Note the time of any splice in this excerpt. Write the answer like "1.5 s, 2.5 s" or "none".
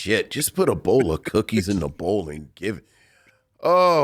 none